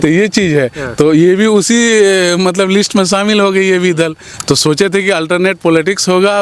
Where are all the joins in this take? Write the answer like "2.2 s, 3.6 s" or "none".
none